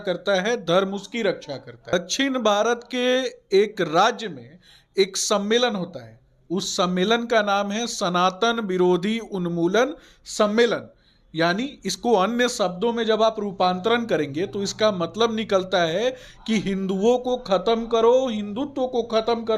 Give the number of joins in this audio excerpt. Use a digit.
1